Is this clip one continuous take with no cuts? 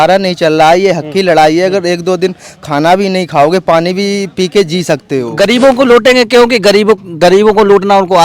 no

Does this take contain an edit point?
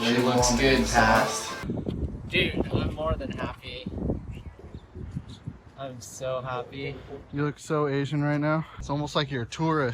yes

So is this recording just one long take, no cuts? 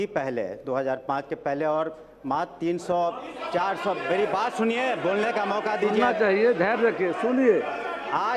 yes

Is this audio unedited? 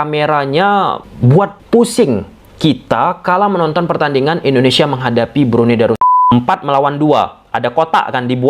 no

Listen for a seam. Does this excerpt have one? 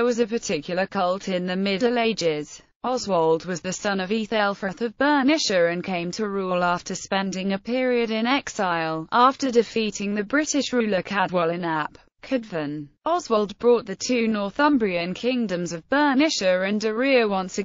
no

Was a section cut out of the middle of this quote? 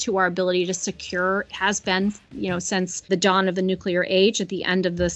yes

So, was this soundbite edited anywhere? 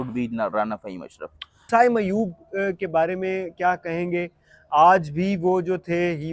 yes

